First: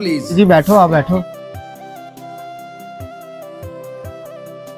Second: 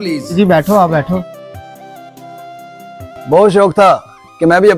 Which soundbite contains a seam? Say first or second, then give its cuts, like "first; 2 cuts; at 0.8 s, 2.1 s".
second; 1 cut; at 3.2 s